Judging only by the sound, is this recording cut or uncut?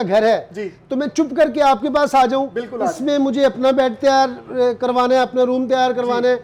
uncut